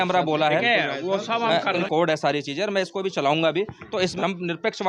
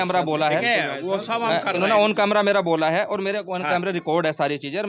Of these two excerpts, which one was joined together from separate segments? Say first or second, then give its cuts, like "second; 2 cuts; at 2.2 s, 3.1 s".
first; 2 cuts; at 1.8 s, 4.1 s